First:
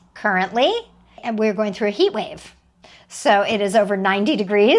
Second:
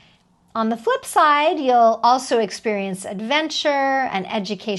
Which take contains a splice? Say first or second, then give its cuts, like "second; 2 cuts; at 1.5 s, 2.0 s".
first; 1 cut; at 1.2 s